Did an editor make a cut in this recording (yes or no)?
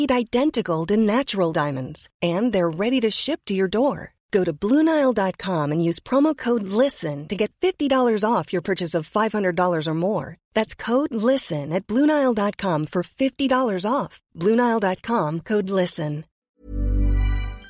yes